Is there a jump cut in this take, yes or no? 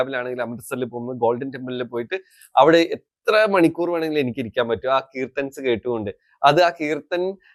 no